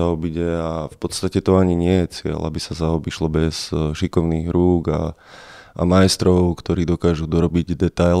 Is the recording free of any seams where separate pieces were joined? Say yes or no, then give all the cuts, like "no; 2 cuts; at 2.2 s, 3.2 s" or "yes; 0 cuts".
yes; 0 cuts